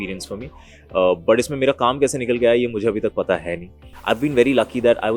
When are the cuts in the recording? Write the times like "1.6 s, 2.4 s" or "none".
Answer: 3.9 s